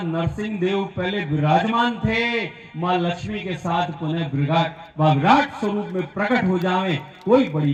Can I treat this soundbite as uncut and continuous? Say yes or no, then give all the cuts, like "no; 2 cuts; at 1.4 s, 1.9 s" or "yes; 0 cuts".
yes; 0 cuts